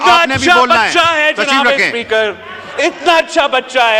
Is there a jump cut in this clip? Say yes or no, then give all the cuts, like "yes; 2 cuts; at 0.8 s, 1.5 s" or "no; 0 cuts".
no; 0 cuts